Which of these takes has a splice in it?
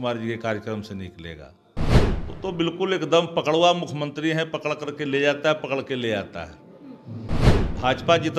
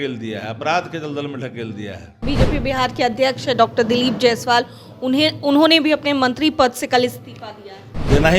second; 1 cut; at 2.2 s

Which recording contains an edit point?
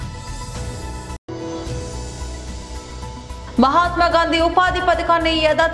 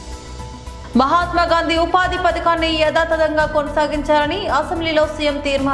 first; 1 cut; at 1.1 s

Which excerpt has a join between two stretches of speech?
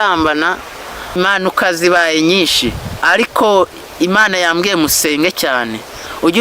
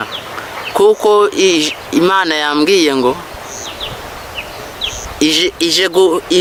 first; 1 cut; at 1.2 s

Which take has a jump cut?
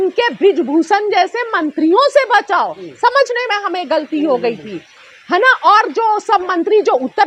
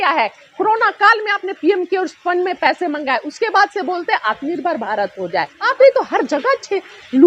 second; 1 cut; at 5.6 s

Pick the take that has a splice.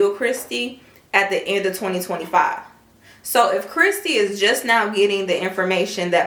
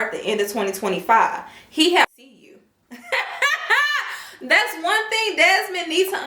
second; 1 cut; at 2.0 s

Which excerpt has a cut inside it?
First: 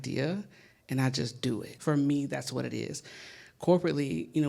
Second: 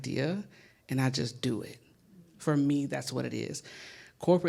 first; 1 cut; at 1.7 s

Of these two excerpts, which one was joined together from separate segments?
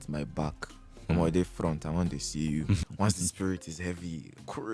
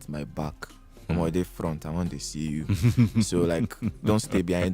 first; 1 cut; at 2.8 s

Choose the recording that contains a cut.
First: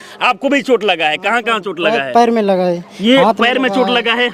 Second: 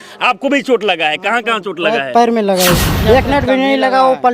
second; 1 cut; at 2.9 s

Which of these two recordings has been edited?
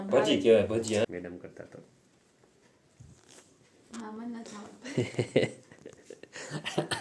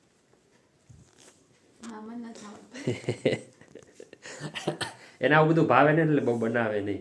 first; 1 cut; at 1.1 s

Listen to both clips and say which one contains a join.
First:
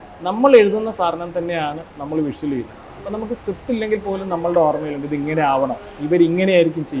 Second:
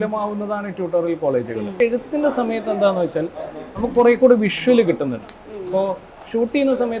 second; 1 cut; at 1.8 s

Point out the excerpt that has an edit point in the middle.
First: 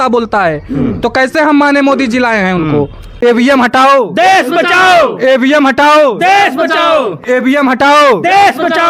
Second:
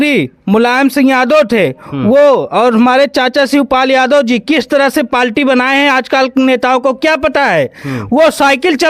first; 1 cut; at 3.0 s

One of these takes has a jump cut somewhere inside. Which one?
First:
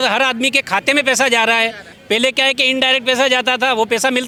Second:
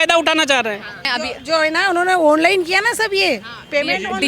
second; 1 cut; at 1.1 s

